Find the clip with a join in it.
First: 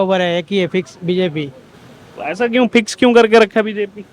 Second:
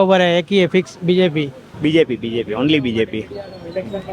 second; 1 cut; at 1.7 s

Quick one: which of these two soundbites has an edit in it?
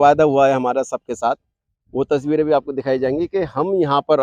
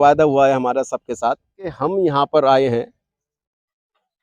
second; 1 cut; at 1.7 s

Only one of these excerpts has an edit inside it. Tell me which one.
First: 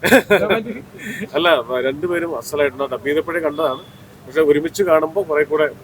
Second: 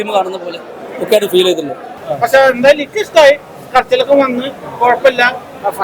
second; 1 cut; at 2.0 s

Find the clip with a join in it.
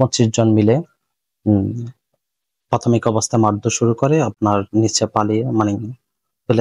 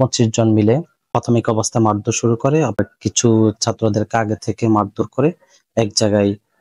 second; 2 cuts; at 0.9 s, 2.8 s

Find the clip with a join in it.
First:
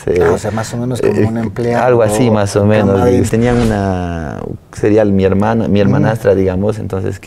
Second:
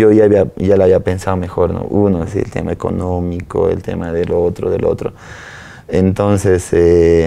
first; 1 cut; at 3.3 s

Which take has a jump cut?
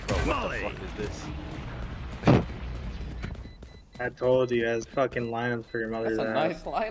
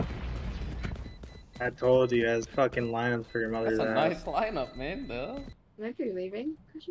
second; 1 cut; at 5.5 s

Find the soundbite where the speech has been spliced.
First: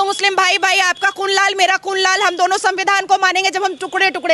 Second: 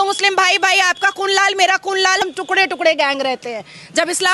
second; 1 cut; at 2.2 s

